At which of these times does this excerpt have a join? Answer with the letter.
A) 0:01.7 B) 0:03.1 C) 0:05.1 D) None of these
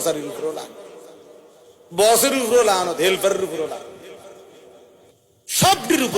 C